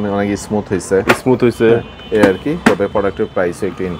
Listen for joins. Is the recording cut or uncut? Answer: uncut